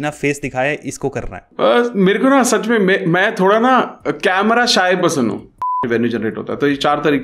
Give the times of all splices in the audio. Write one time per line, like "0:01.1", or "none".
0:01.5
0:05.7

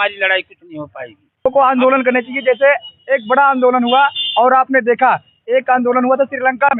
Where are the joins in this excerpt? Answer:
0:01.5

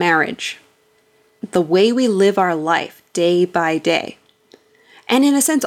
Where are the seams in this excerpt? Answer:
0:01.4

